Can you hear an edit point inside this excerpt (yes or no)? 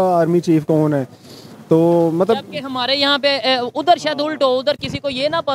no